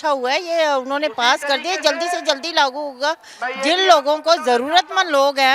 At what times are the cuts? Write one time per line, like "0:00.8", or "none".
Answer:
none